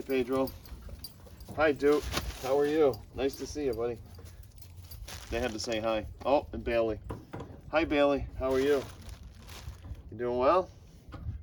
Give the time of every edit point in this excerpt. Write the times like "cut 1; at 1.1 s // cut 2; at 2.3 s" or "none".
none